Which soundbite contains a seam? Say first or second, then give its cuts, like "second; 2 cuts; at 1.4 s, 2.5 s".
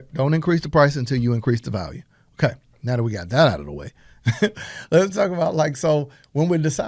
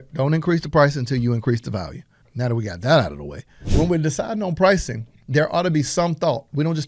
second; 2 cuts; at 2.2 s, 3.6 s